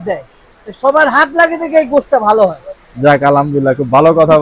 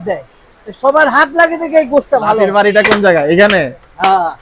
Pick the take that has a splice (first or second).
second